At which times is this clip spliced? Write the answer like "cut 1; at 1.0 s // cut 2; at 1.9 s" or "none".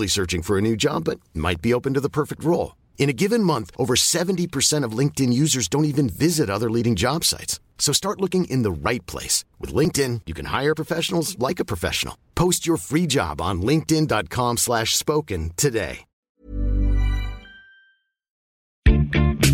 none